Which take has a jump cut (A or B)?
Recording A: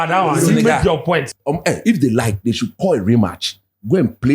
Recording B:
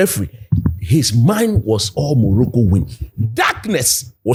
A